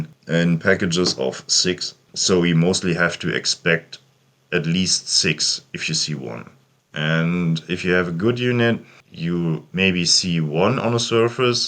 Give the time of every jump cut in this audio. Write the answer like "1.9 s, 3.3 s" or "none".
2.0 s